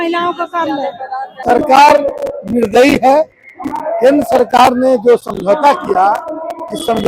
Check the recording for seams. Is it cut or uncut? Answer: cut